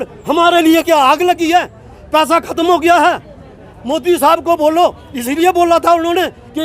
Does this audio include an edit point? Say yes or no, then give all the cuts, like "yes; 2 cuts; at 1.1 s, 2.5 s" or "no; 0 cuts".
no; 0 cuts